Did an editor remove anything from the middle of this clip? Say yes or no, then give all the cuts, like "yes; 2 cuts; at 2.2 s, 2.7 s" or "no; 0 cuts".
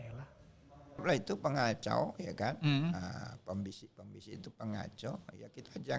yes; 1 cut; at 1.0 s